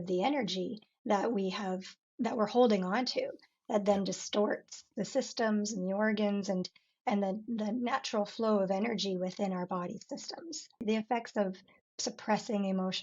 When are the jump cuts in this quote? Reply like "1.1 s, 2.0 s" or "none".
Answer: 10.8 s